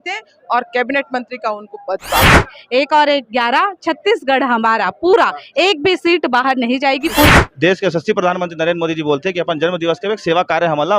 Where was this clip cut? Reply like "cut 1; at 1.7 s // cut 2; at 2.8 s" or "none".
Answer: cut 1; at 2.4 s // cut 2; at 7.3 s